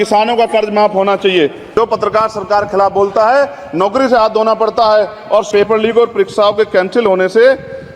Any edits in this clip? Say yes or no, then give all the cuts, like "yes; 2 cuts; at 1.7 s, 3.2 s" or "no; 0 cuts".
yes; 2 cuts; at 1.6 s, 5.5 s